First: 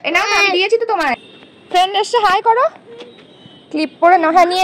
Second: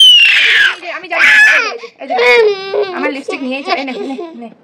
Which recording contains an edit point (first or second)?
first